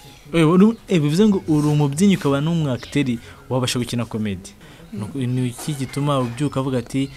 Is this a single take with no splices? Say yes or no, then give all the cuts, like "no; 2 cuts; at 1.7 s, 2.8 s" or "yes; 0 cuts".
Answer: no; 1 cut; at 4.6 s